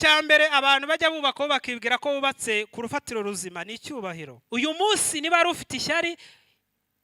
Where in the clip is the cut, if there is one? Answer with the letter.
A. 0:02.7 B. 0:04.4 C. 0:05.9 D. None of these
B